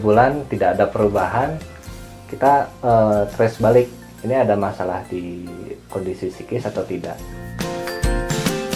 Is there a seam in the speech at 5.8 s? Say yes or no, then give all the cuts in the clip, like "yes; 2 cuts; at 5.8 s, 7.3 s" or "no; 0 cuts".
no; 1 cut; at 7.5 s